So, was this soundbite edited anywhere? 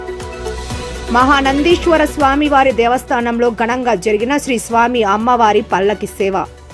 no; 0 cuts

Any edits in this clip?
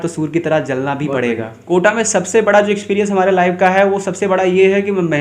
yes; 1 cut; at 1.5 s

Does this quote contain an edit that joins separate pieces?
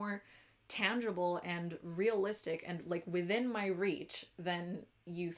no; 0 cuts

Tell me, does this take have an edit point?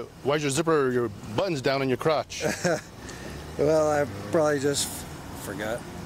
no; 0 cuts

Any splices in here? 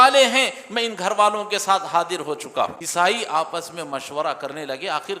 yes; 1 cut; at 2.8 s

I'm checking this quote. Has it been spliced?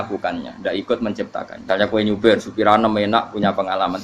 yes; 1 cut; at 1.5 s

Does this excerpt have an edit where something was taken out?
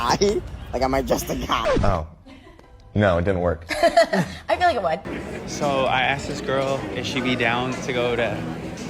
yes; 2 cuts; at 1.6 s, 5.0 s

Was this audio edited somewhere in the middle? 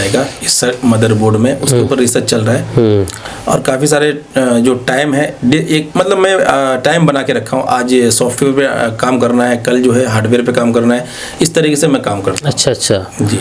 no; 0 cuts

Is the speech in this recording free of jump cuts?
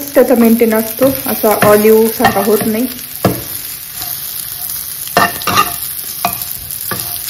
yes; 0 cuts

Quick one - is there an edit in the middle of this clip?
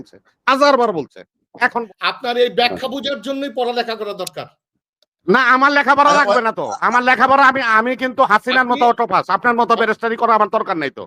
yes; 1 cut; at 1.8 s

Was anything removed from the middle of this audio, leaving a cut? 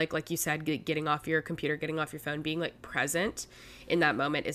no; 0 cuts

